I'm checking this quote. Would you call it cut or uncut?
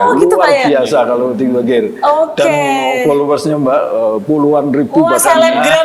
uncut